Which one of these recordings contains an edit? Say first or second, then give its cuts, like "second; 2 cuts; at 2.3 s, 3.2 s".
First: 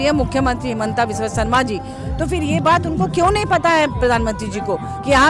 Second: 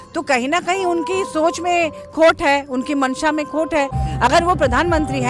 second; 1 cut; at 4.0 s